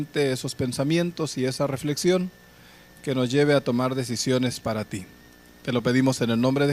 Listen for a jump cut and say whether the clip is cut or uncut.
cut